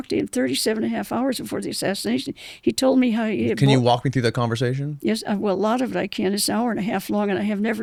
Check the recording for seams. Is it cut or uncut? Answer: uncut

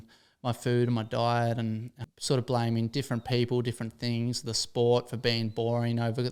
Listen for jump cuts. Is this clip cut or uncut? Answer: cut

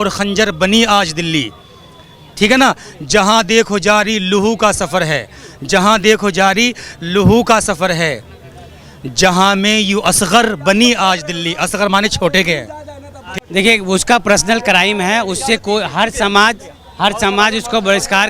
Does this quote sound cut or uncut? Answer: uncut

